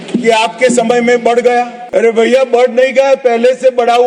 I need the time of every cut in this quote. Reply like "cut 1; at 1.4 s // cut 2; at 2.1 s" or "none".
cut 1; at 1.8 s